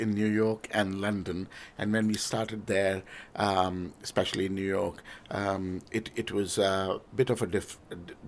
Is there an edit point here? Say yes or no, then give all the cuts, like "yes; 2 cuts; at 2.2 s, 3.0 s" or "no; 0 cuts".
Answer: no; 0 cuts